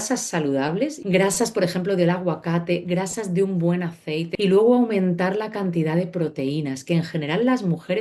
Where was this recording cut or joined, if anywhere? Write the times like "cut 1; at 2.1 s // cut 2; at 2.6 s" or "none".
cut 1; at 1.0 s // cut 2; at 4.3 s